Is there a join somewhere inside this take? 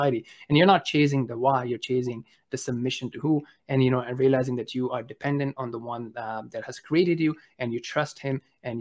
no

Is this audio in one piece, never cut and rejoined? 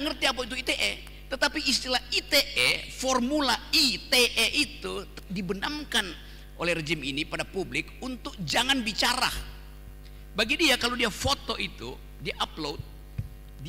yes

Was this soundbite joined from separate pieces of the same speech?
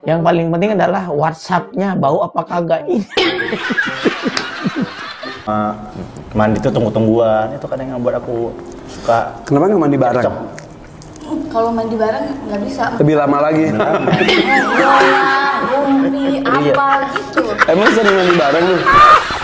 yes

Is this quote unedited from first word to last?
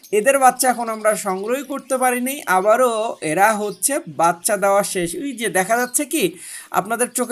yes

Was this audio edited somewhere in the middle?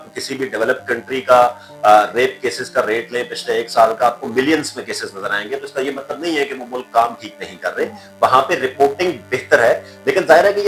no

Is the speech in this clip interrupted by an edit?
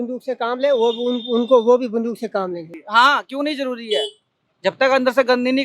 yes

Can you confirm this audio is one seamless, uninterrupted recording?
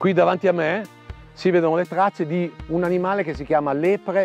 yes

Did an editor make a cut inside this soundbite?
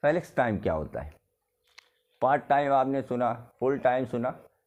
no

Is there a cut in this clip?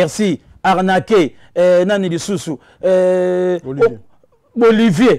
no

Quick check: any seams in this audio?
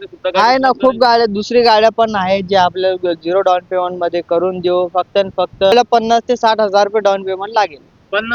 yes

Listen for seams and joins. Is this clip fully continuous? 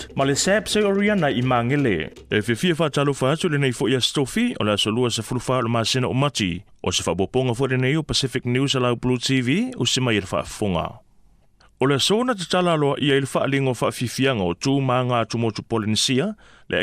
no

